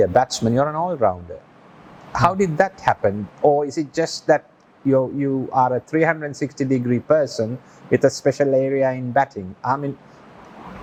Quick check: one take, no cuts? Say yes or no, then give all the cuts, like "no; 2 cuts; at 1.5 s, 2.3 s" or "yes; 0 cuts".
yes; 0 cuts